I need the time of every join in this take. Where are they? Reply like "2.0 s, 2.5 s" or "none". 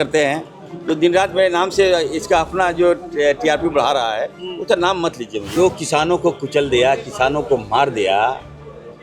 5.5 s